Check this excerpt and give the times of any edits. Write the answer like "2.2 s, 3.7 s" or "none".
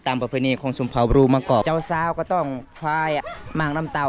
1.6 s, 3.3 s